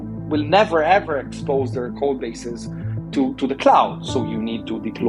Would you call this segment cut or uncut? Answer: uncut